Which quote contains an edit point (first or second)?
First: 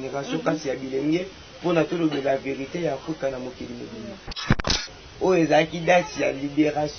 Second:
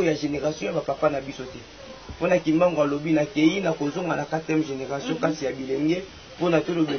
first